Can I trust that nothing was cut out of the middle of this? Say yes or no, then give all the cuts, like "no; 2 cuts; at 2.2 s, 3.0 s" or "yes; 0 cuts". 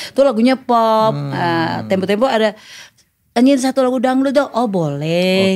yes; 0 cuts